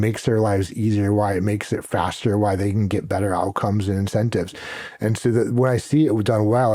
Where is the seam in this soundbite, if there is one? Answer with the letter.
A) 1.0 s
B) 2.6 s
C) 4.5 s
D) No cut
D